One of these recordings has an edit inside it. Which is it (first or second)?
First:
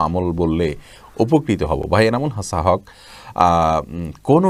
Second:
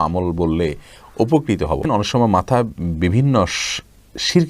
second